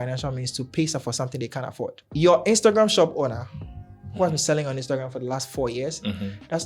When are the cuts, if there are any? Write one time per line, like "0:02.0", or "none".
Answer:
0:02.0